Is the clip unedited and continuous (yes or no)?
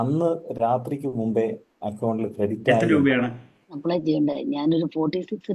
no